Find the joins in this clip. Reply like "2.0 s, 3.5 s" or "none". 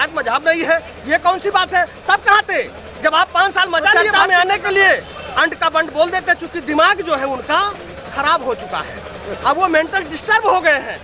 4.1 s